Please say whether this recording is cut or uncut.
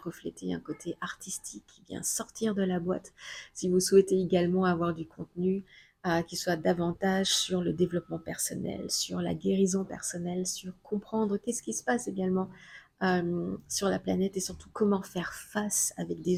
uncut